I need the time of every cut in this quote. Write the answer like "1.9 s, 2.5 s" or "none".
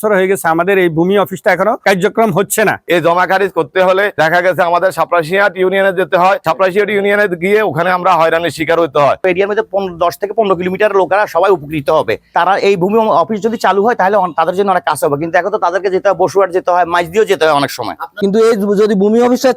2.8 s, 9.2 s, 18.1 s